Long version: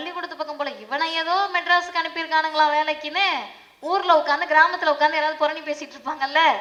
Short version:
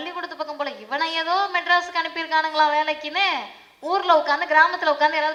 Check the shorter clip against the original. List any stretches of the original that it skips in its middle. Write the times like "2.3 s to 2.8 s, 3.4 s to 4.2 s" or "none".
none